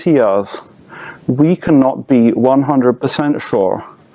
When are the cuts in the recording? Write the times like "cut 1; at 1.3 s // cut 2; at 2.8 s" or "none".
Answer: none